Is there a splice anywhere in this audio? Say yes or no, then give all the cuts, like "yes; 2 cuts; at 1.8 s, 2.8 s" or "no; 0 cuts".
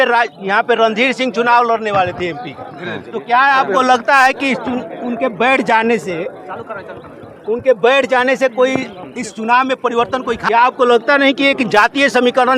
yes; 1 cut; at 10.5 s